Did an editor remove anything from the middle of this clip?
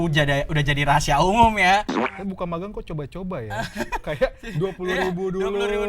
yes; 1 cut; at 1.9 s

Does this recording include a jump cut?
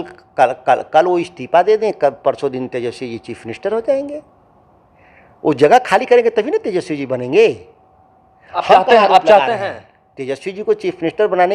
no; 0 cuts

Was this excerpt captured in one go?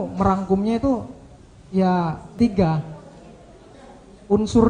no; 1 cut; at 2.4 s

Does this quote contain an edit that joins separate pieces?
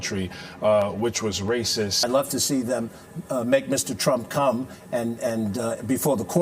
yes; 1 cut; at 2.0 s

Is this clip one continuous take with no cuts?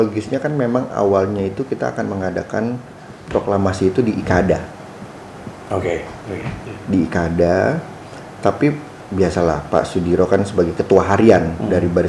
yes; 0 cuts

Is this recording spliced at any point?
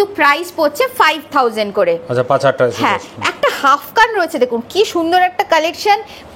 no; 0 cuts

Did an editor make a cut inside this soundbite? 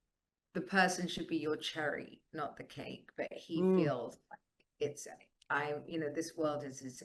no; 0 cuts

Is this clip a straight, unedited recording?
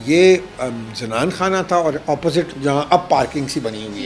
no; 1 cut; at 2.5 s

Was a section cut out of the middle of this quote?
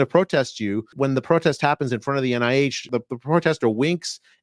yes; 2 cuts; at 0.9 s, 2.9 s

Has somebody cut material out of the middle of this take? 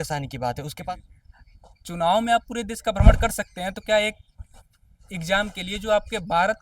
yes; 1 cut; at 1.0 s

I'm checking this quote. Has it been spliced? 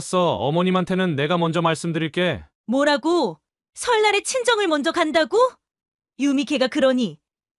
yes; 1 cut; at 2.5 s

